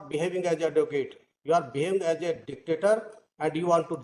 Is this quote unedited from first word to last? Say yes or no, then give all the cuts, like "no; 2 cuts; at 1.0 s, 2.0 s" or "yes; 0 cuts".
yes; 0 cuts